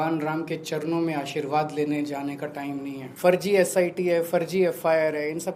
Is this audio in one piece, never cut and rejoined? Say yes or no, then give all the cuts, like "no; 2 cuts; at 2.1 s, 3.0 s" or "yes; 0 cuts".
no; 1 cut; at 3.0 s